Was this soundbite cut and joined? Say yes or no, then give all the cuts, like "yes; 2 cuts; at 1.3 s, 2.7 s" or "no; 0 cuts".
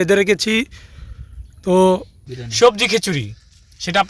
yes; 1 cut; at 2.2 s